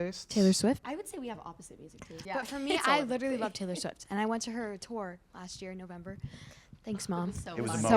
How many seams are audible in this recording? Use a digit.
2